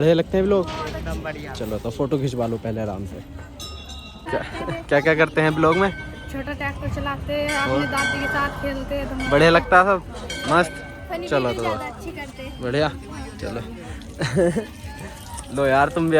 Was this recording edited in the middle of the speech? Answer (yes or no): no